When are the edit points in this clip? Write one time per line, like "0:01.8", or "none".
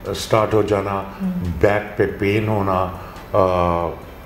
none